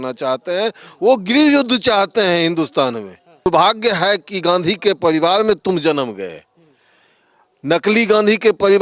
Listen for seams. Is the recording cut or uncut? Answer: cut